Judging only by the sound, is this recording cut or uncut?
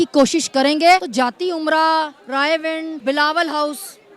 cut